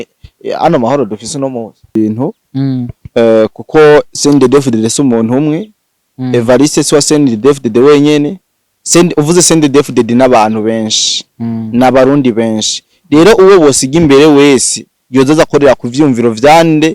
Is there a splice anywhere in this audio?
yes; 1 cut; at 1.9 s

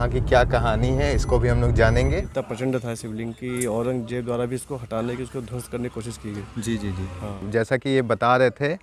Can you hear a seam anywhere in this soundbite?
yes; 2 cuts; at 2.3 s, 7.5 s

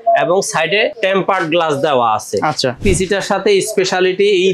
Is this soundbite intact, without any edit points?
no; 2 cuts; at 1.0 s, 2.8 s

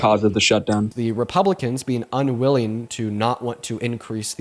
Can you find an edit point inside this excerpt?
yes; 1 cut; at 0.9 s

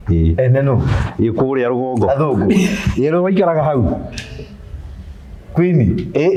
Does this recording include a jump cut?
no; 0 cuts

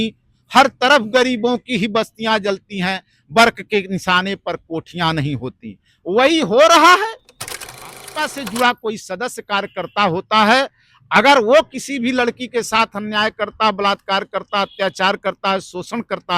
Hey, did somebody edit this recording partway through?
yes; 1 cut; at 7.8 s

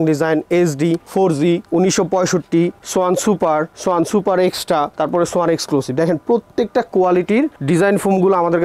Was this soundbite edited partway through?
no; 0 cuts

